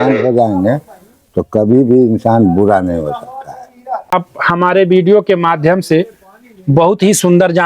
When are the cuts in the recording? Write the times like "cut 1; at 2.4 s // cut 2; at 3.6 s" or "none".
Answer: cut 1; at 4.1 s